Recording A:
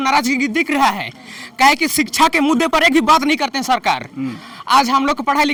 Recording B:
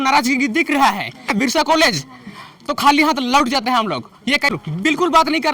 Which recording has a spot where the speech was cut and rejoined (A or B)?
B